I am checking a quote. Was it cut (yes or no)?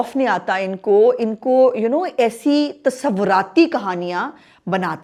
no